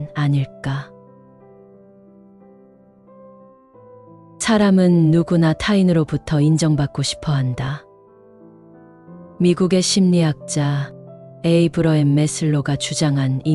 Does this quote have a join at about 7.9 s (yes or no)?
yes